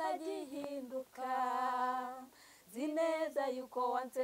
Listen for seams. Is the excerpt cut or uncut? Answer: uncut